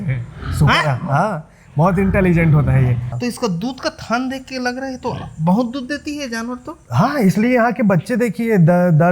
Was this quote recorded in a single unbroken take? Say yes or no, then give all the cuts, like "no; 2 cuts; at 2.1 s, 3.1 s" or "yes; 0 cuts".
no; 1 cut; at 3.1 s